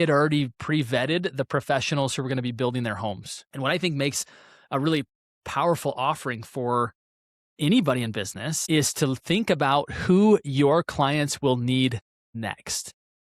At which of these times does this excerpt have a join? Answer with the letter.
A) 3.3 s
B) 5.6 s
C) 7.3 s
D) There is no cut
A